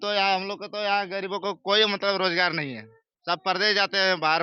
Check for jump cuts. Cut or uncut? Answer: uncut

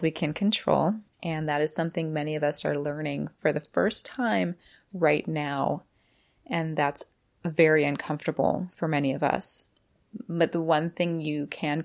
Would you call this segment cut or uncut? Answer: cut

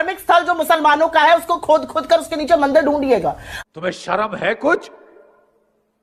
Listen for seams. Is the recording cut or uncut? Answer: uncut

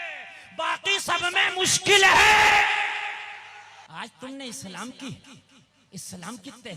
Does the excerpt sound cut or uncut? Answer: cut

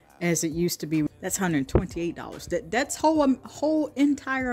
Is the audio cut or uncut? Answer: cut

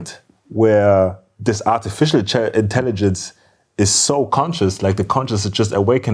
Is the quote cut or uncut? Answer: cut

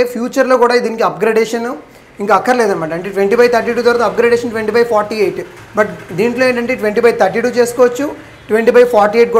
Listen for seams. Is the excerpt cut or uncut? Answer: uncut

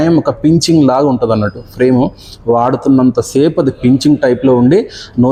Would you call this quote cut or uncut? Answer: uncut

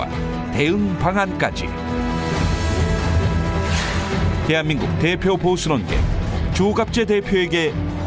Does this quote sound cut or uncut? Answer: cut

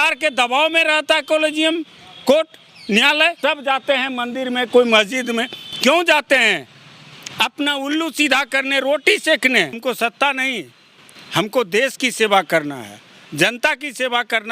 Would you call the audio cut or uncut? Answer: cut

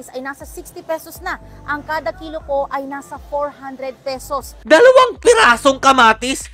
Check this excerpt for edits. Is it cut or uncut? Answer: uncut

